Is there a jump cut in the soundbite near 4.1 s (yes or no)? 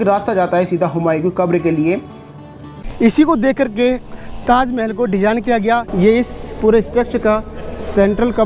no